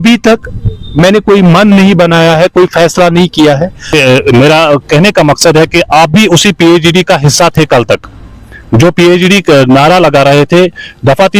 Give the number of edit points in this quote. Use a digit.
1